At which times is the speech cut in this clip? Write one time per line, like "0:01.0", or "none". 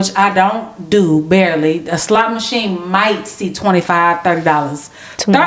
none